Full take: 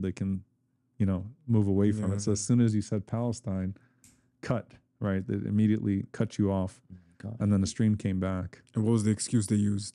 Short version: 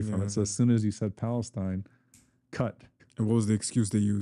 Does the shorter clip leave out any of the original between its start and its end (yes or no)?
yes